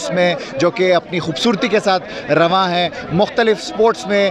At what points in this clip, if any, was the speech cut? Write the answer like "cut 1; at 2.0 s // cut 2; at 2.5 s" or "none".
none